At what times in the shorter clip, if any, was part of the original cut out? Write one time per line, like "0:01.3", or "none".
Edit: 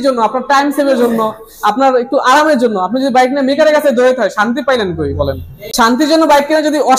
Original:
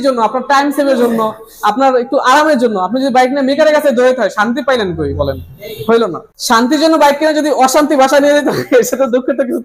0:05.6